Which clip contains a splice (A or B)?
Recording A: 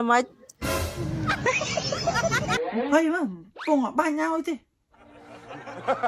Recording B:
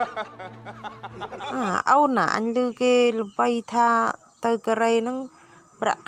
A